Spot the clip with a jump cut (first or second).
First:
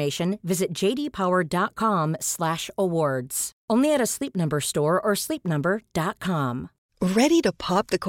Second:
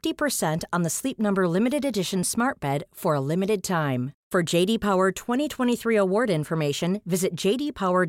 first